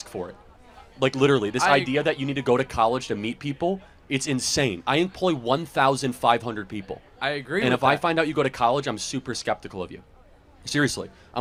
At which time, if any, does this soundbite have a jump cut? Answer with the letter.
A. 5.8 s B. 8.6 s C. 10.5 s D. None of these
D